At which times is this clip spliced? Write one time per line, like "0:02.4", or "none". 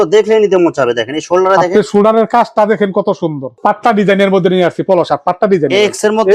0:03.5